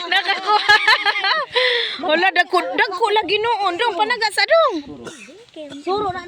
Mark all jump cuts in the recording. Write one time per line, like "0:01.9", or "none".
none

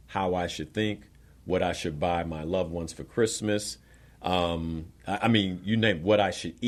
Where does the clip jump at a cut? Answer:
none

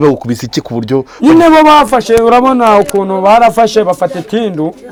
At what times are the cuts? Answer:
none

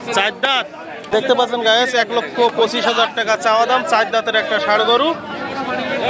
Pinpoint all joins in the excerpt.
0:01.1

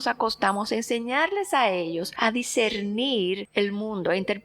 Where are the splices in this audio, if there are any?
0:02.1
0:03.4

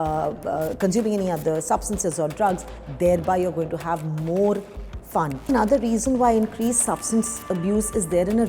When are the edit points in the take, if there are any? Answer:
0:05.5

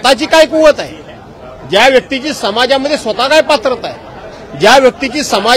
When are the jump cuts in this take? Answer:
none

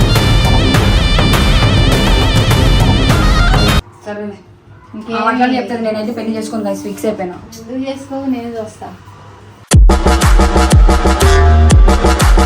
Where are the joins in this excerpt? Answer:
0:03.9

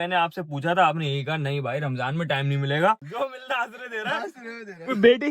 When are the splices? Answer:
0:03.0

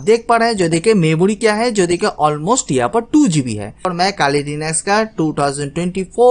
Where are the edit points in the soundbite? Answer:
0:03.9

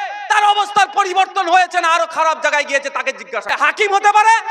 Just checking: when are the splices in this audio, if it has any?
0:03.4

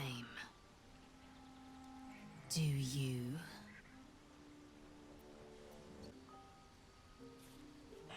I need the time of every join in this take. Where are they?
0:06.1

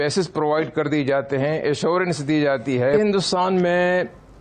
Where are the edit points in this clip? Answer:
0:02.9

